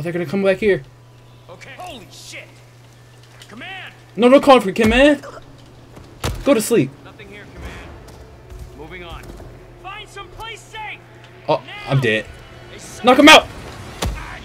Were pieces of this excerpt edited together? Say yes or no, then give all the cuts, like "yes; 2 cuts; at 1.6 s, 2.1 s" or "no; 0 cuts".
no; 0 cuts